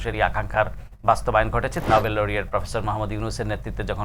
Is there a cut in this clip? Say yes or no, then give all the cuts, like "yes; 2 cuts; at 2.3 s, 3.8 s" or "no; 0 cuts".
yes; 1 cut; at 1.8 s